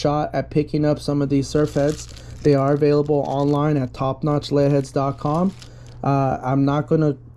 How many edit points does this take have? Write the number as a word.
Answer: zero